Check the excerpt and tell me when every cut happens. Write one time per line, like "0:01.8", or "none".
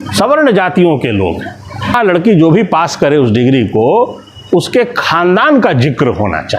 0:02.0